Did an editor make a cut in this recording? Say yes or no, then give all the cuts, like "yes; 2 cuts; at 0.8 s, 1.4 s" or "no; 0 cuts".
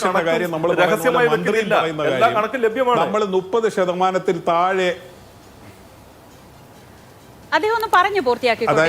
no; 0 cuts